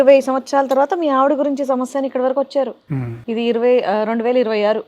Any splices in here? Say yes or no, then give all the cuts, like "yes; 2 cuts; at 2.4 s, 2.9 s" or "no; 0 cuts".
no; 0 cuts